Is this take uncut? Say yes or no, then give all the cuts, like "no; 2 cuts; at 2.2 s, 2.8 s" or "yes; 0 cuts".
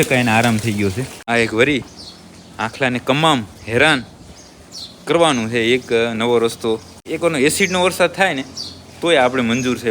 no; 2 cuts; at 1.1 s, 7.0 s